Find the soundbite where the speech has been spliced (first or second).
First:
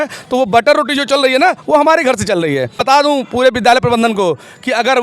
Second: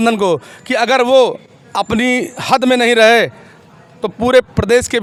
first